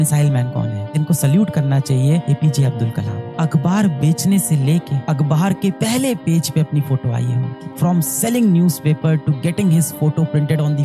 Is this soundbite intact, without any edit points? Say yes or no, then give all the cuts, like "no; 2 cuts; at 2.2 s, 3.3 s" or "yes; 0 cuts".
no; 1 cut; at 0.9 s